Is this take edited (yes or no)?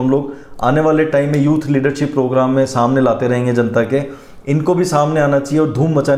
no